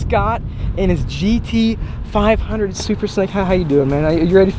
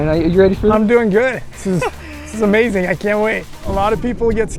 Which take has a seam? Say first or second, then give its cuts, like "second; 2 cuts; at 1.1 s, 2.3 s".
second; 1 cut; at 3.7 s